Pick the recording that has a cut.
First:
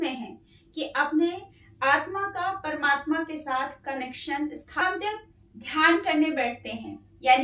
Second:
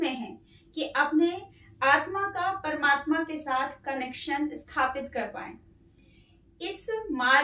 first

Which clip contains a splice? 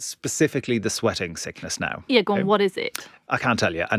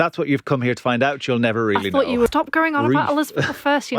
second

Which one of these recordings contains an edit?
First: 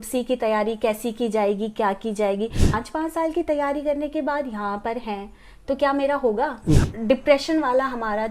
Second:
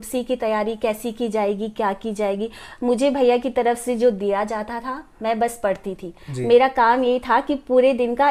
first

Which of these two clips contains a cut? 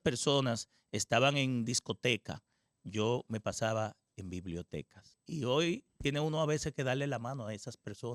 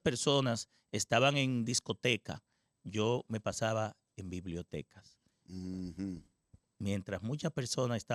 first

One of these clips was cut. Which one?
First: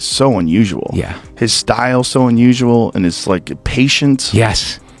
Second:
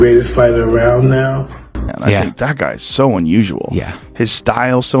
second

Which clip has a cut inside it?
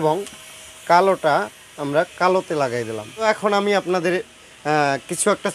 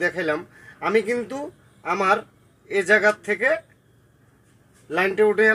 first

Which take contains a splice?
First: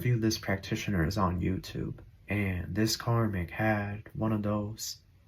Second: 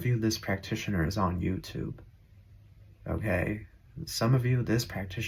first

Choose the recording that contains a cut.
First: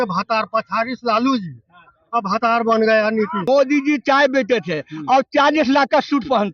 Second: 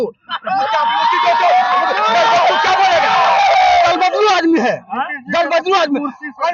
first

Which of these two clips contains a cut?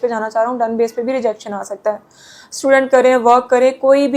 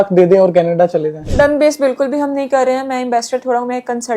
second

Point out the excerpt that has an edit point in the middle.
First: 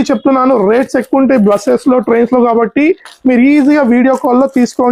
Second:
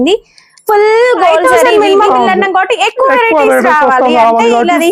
second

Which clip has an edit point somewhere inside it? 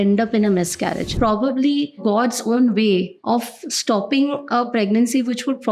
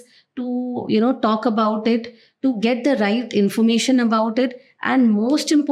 first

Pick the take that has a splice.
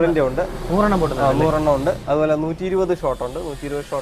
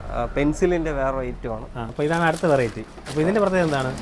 second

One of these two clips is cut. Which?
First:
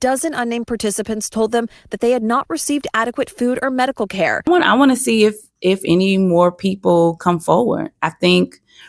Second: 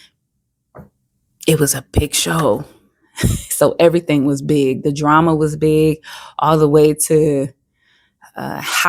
first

